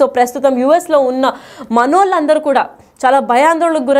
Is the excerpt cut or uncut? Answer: uncut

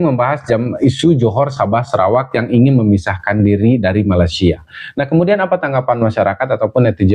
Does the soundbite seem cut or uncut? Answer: uncut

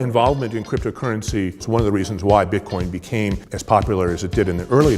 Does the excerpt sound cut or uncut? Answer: cut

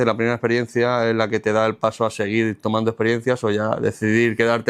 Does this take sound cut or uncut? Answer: uncut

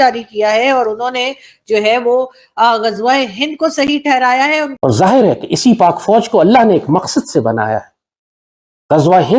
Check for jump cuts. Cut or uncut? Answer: cut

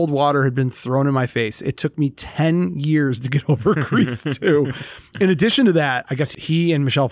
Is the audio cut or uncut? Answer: uncut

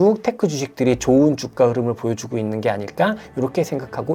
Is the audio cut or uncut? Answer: uncut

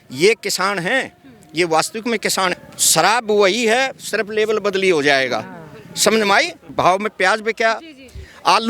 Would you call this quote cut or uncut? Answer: cut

